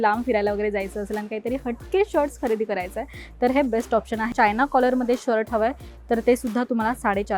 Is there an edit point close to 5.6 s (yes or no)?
no